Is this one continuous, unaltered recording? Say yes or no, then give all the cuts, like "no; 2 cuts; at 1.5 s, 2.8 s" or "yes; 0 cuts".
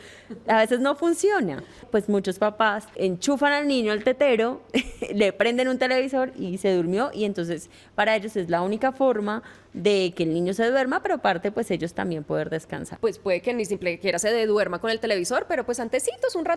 no; 3 cuts; at 1.8 s, 3.0 s, 12.8 s